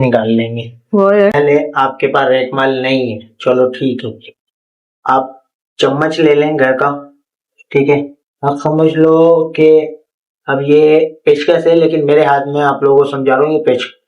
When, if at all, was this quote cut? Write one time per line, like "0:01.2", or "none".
0:01.3